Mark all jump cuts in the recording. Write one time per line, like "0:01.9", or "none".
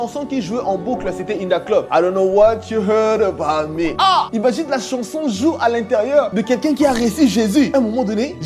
0:01.9